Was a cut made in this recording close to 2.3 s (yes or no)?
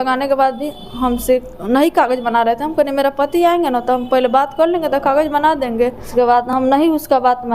no